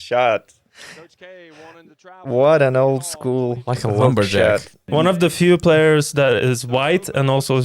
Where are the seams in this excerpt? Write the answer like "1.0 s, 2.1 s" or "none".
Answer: 4.9 s